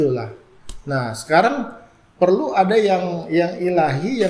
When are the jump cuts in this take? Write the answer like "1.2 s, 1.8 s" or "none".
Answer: none